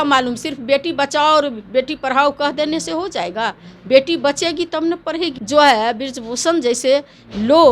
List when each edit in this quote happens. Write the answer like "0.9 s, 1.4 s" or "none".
5.4 s

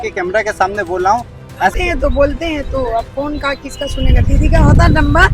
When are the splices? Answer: 1.7 s

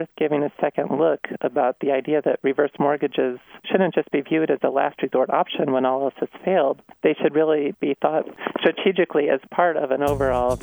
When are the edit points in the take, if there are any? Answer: 3.5 s, 6.9 s, 8.3 s

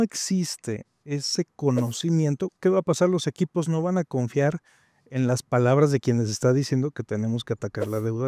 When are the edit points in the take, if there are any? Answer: none

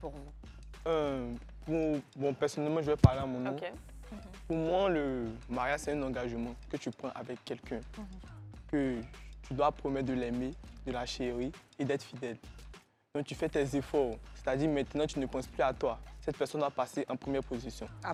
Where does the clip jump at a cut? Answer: none

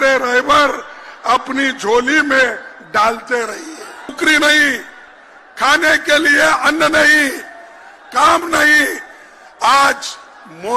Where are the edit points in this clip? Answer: 4.1 s

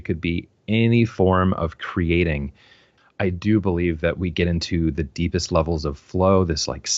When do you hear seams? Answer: 2.9 s

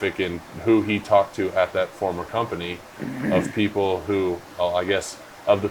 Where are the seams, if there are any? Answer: none

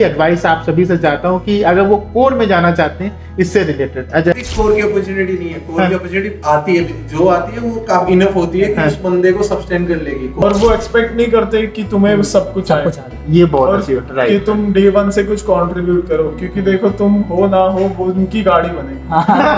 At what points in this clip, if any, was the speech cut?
4.3 s, 10.4 s

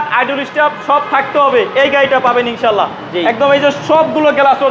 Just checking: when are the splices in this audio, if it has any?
none

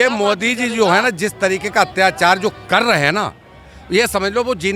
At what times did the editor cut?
none

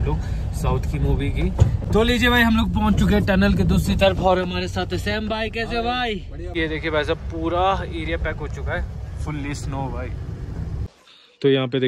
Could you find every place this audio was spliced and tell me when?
1.8 s, 6.5 s, 10.9 s

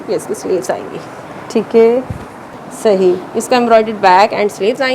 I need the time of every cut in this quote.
2.5 s

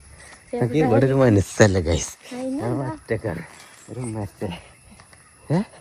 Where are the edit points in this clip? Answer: none

